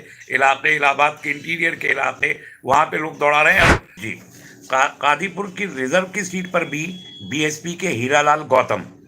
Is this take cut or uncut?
cut